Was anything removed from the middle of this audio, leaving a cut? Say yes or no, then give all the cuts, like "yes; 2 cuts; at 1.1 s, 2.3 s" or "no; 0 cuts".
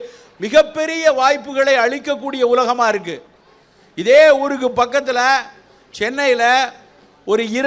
no; 0 cuts